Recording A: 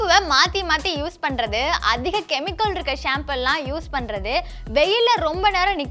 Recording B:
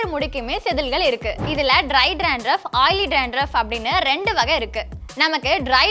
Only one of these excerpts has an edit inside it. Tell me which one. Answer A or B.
B